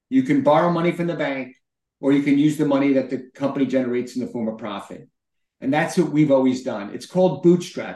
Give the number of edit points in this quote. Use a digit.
0